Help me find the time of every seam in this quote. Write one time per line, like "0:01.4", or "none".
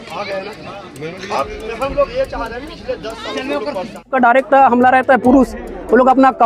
0:04.1